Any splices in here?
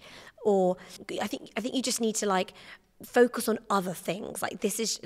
yes; 1 cut; at 1.0 s

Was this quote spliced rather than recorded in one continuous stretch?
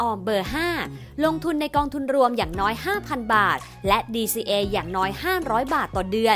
no; 0 cuts

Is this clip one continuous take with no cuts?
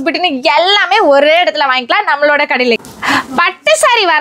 no; 1 cut; at 2.8 s

